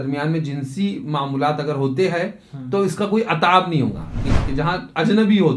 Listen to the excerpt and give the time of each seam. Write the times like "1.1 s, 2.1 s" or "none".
4.2 s